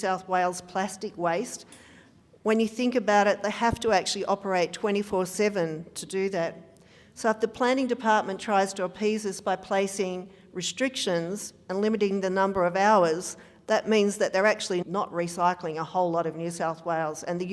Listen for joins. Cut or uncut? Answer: cut